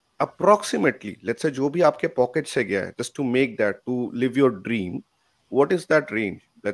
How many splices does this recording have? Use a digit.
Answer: 0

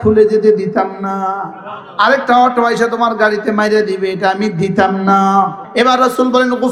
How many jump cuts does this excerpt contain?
1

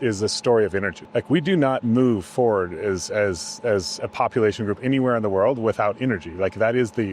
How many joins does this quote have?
1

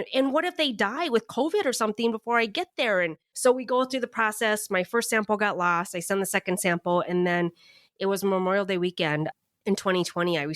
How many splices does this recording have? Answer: 1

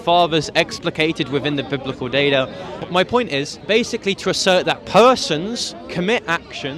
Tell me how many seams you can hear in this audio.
2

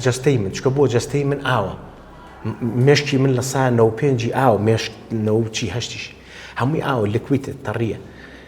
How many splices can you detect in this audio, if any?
0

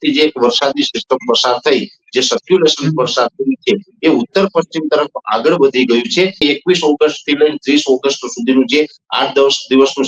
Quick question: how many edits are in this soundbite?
1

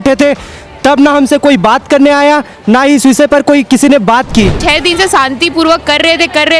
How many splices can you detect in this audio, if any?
1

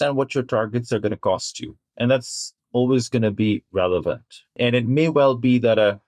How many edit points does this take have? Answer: 2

